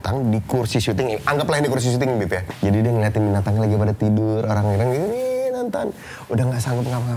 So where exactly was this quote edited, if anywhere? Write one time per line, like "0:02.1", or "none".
0:02.5